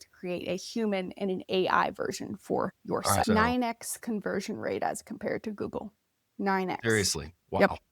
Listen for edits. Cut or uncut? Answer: cut